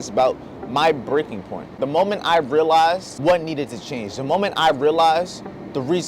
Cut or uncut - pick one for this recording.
cut